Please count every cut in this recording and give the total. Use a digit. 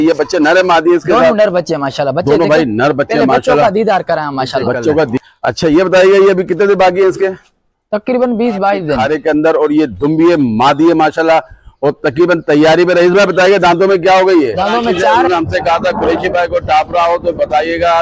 3